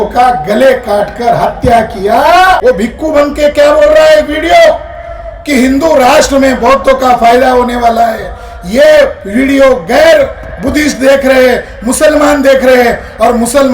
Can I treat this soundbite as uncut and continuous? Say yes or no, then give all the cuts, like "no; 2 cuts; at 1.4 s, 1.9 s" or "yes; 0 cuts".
no; 1 cut; at 2.6 s